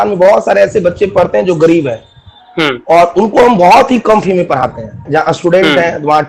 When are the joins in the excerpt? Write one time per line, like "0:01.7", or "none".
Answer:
0:05.0